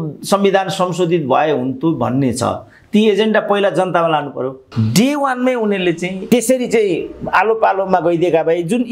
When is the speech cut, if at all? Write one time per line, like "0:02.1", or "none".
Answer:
0:04.6
0:06.2